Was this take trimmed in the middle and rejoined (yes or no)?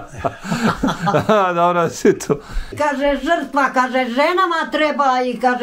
yes